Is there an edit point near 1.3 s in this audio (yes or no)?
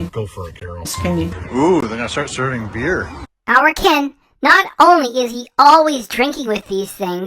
yes